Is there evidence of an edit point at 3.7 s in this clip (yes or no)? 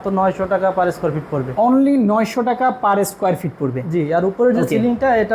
no